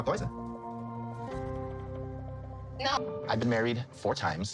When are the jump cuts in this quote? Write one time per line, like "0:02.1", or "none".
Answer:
0:01.4